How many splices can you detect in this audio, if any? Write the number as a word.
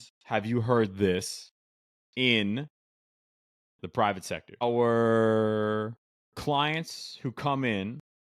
one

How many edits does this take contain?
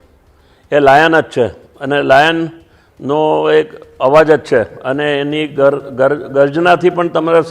zero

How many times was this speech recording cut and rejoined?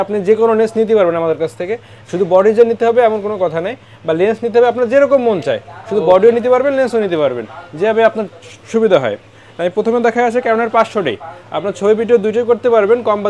zero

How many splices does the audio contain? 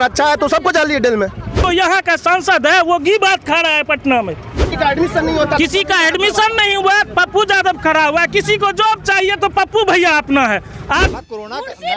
three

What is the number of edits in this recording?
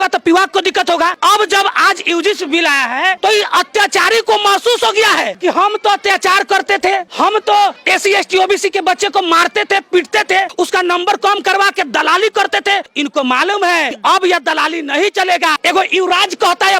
six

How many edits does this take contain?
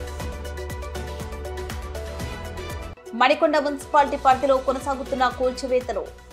one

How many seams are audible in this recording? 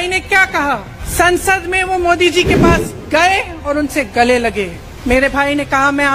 two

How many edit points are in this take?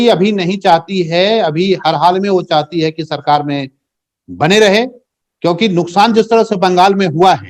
zero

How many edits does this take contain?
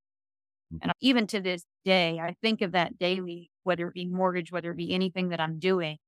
one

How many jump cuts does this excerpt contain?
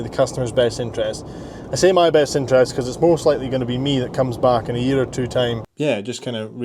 one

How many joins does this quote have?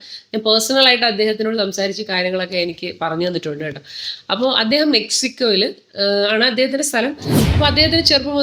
zero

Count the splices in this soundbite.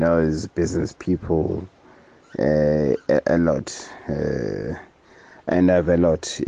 zero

